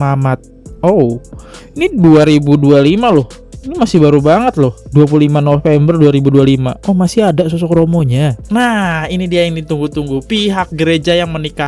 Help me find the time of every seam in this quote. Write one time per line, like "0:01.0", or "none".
0:08.4